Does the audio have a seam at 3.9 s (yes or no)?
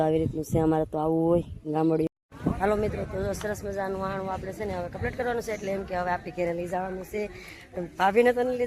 no